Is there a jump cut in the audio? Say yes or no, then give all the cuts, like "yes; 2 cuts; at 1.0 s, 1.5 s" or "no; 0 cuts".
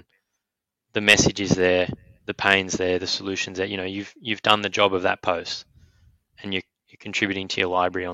no; 0 cuts